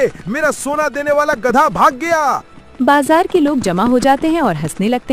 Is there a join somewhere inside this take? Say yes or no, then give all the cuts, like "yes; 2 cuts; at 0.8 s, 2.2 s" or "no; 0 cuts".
yes; 1 cut; at 2.5 s